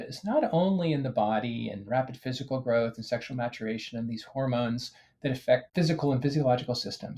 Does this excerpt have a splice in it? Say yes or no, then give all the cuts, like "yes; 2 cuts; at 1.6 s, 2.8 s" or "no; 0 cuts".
no; 0 cuts